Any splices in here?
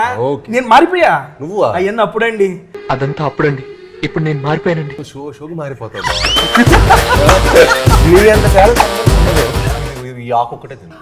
yes; 1 cut; at 9.7 s

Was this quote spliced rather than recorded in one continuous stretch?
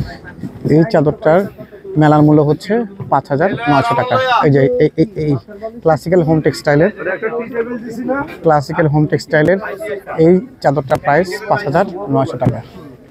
no; 0 cuts

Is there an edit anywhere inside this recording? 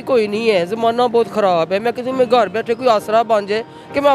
no; 0 cuts

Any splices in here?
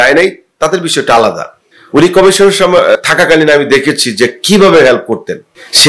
yes; 1 cut; at 3.0 s

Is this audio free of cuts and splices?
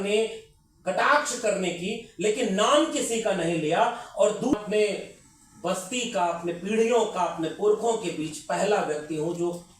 no; 1 cut; at 4.5 s

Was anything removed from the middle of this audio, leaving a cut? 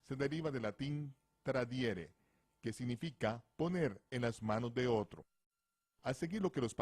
yes; 1 cut; at 0.9 s

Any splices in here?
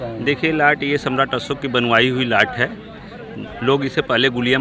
no; 0 cuts

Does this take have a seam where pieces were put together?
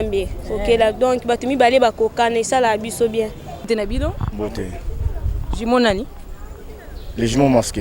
yes; 1 cut; at 3.7 s

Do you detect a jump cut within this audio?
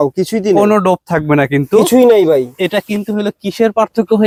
no; 0 cuts

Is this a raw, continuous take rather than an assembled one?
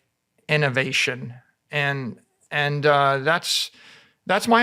yes; 0 cuts

